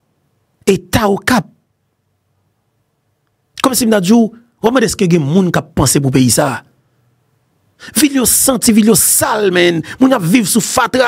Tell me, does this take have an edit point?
no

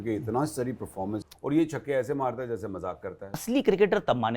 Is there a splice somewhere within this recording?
yes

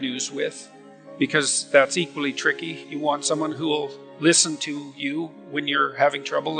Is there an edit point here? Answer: yes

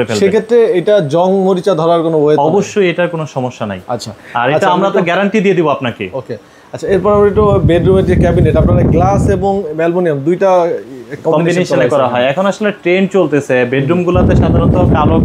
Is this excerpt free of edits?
yes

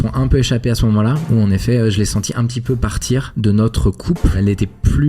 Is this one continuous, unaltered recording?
no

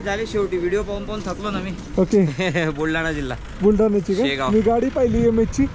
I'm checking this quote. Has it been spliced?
no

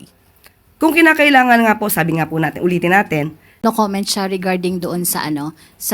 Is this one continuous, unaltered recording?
no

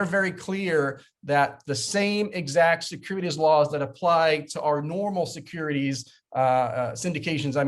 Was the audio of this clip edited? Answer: no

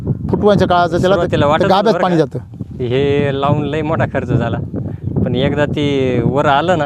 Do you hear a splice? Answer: no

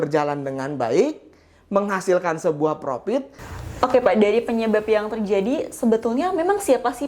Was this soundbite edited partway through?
yes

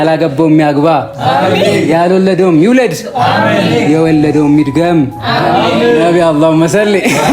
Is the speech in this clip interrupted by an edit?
no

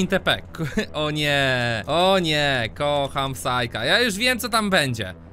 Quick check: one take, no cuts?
no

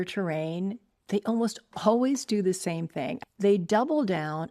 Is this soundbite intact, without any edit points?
no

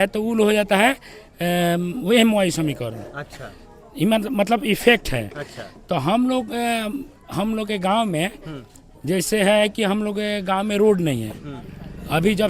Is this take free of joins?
yes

